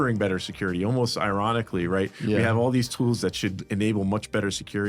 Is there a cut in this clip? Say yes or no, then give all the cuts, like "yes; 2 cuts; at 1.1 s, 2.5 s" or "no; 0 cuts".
no; 0 cuts